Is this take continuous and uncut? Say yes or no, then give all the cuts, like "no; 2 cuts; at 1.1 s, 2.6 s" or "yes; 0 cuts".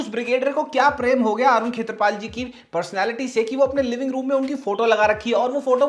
yes; 0 cuts